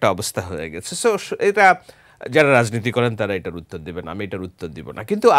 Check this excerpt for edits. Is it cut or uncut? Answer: uncut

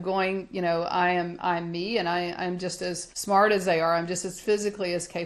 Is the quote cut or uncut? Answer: cut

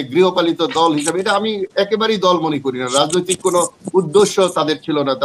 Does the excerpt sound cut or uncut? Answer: uncut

